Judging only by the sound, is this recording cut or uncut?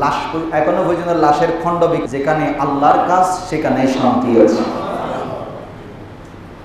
cut